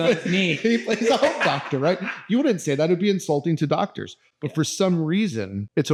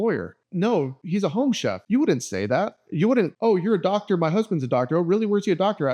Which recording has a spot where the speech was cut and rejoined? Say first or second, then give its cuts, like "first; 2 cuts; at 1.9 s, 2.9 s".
second; 2 cuts; at 1.2 s, 3.3 s